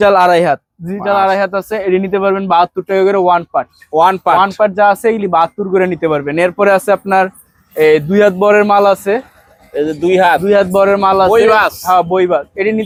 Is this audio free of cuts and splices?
yes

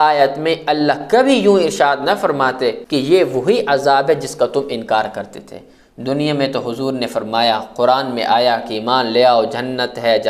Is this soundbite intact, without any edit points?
no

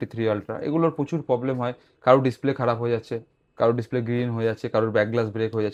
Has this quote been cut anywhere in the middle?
no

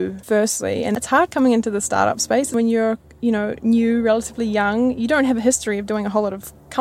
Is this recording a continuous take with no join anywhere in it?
no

